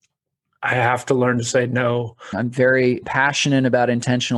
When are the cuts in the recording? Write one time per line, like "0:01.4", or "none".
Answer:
0:02.2
0:03.0